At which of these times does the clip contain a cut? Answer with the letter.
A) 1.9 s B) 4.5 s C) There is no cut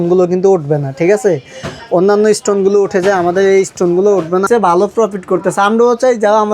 B